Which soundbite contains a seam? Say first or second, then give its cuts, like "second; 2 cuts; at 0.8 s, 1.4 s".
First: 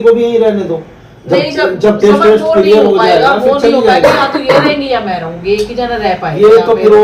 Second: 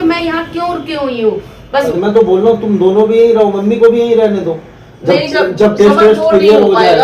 second; 1 cut; at 1.9 s